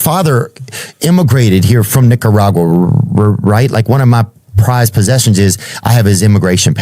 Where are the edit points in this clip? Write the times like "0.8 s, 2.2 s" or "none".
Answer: none